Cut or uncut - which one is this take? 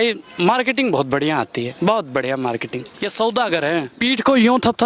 cut